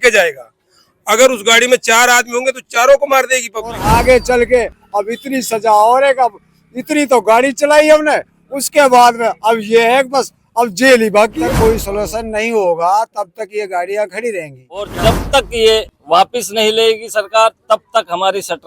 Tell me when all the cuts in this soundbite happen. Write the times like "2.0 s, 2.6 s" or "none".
3.7 s, 11.4 s, 14.9 s